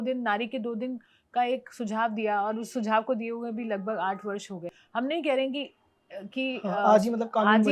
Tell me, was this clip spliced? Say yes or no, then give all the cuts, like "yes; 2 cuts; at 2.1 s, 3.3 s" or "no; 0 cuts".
yes; 1 cut; at 4.8 s